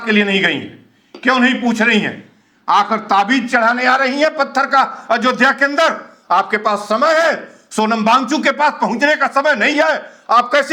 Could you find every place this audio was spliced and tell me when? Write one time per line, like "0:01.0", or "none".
none